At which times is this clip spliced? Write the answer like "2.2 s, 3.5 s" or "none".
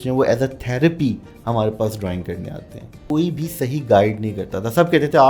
3.0 s